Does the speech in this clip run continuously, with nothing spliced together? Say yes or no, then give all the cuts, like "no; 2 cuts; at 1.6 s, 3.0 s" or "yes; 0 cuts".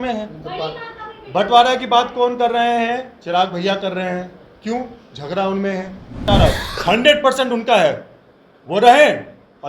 no; 1 cut; at 6.2 s